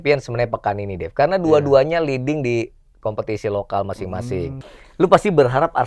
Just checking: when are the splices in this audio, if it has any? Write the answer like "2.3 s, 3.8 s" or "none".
4.6 s